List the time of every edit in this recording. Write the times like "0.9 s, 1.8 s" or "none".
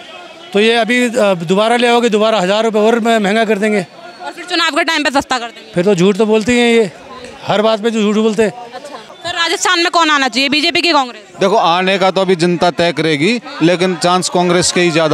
9.1 s